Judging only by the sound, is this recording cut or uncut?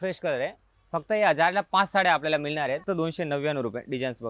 cut